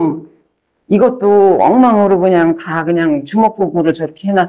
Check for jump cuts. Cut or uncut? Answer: uncut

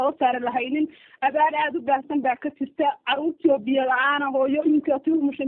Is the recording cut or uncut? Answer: uncut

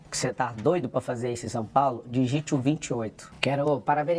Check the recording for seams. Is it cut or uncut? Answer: cut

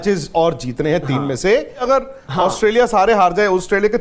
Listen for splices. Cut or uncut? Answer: cut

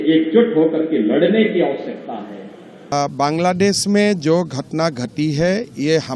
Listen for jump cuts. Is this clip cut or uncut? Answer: cut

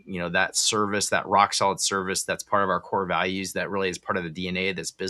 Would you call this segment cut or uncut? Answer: uncut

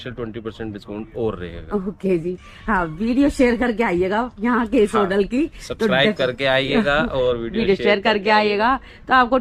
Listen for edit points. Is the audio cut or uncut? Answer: uncut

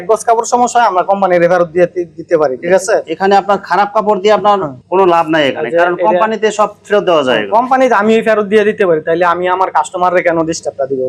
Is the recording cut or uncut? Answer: uncut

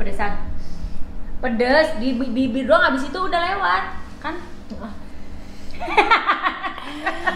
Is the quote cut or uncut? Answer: uncut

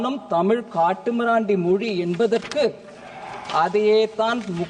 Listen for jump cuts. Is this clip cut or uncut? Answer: uncut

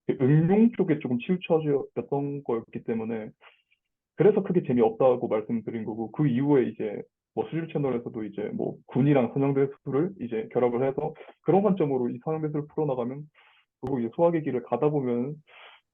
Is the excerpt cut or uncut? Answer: cut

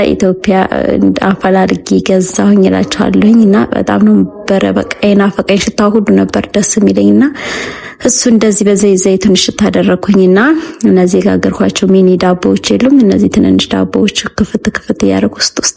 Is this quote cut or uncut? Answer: uncut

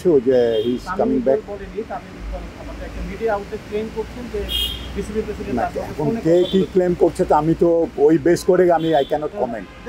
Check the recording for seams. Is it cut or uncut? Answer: uncut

